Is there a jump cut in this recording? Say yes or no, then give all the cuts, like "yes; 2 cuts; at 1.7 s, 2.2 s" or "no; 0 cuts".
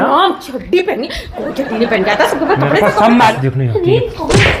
yes; 1 cut; at 3.3 s